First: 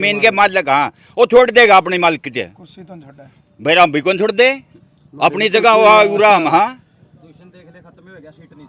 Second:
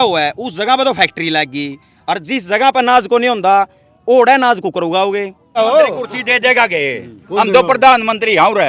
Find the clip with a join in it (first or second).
second